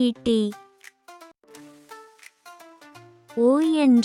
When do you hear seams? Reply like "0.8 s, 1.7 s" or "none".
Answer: none